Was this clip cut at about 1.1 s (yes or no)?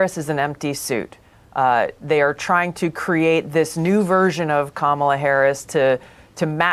no